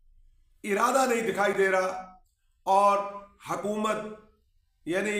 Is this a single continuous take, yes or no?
yes